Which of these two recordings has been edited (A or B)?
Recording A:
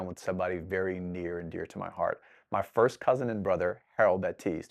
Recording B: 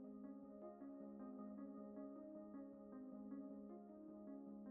B